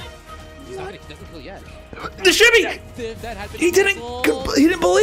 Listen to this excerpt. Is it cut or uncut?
uncut